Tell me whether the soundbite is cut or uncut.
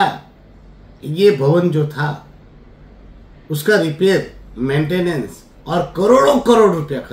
uncut